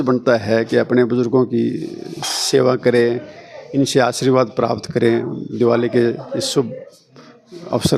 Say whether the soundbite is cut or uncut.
uncut